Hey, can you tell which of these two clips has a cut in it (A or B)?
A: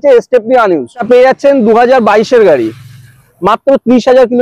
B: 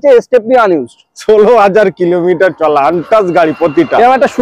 A